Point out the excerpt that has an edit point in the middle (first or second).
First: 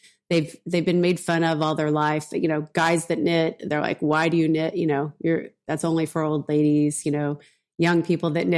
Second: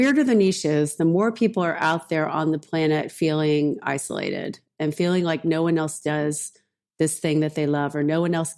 second